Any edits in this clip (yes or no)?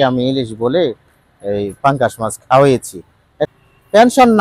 yes